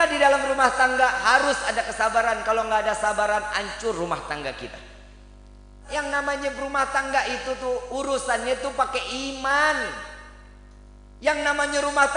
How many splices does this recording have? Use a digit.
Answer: 1